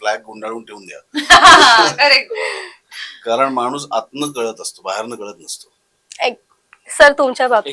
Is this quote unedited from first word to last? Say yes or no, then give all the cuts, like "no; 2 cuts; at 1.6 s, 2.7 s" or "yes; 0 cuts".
yes; 0 cuts